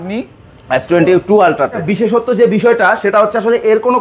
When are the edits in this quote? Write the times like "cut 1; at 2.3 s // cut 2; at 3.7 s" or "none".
cut 1; at 1.8 s